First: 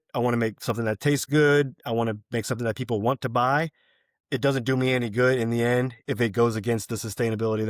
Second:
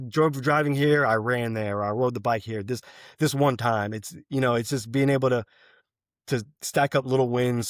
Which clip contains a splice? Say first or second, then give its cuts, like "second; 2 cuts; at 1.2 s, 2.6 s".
first; 1 cut; at 6.0 s